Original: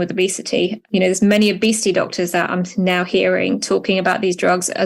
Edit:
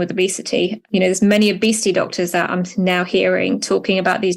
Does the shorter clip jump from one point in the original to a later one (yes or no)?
no